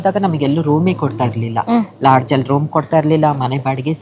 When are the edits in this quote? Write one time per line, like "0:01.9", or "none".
none